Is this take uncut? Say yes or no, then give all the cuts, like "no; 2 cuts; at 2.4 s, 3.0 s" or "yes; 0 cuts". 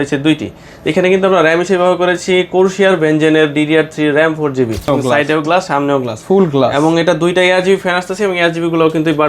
no; 1 cut; at 4.9 s